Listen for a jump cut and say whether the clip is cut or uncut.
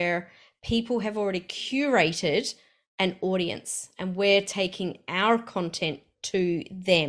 uncut